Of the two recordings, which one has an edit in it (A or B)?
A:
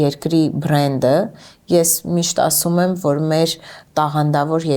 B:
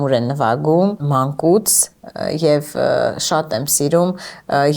B